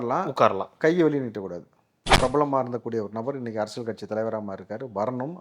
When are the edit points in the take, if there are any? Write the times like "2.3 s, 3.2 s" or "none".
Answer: 2.1 s